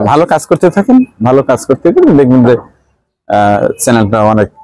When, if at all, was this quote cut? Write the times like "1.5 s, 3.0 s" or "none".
none